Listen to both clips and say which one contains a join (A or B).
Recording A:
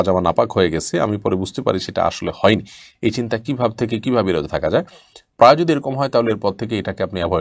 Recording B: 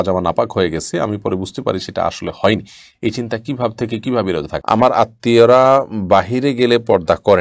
B